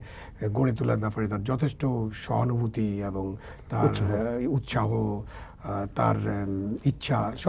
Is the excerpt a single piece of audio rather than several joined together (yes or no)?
yes